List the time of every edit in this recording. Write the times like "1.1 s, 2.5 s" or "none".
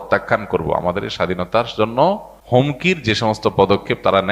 2.3 s